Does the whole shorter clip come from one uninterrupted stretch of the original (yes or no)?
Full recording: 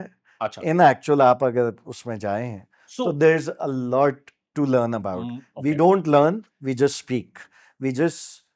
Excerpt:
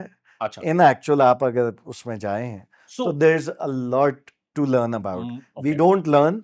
yes